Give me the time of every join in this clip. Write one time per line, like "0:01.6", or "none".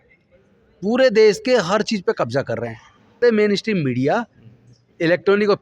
0:03.2